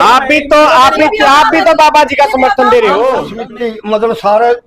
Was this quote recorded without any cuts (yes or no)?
no